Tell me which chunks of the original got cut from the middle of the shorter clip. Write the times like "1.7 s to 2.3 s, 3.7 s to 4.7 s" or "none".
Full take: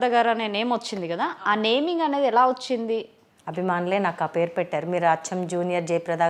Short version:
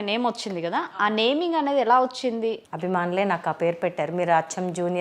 3.1 s to 3.4 s